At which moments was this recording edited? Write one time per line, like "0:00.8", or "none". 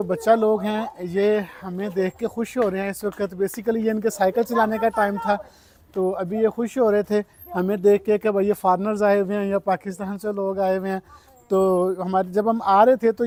none

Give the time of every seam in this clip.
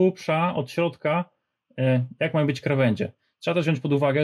none

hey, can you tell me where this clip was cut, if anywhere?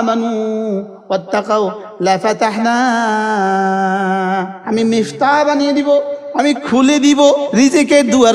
0:04.6
0:06.2
0:07.4

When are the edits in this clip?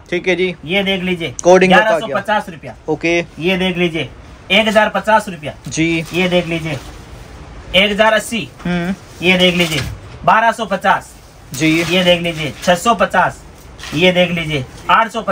none

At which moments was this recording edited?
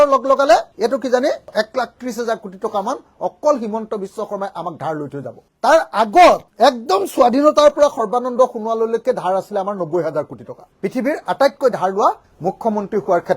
0:10.6

